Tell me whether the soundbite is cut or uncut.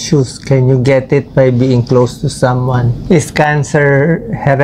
cut